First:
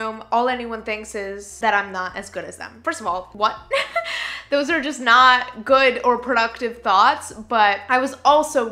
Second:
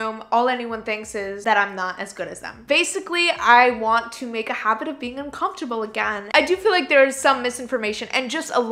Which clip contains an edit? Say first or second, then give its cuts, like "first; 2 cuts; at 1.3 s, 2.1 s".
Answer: second; 3 cuts; at 1.4 s, 2.5 s, 6.2 s